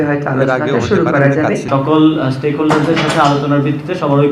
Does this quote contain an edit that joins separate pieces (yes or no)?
yes